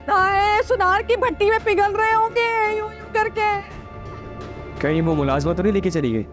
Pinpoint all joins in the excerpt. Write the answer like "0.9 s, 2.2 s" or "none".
none